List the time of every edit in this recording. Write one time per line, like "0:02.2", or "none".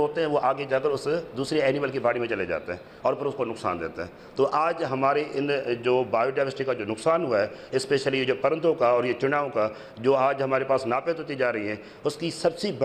none